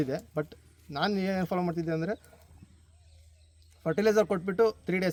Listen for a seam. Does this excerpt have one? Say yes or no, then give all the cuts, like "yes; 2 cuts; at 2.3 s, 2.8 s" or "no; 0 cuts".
no; 0 cuts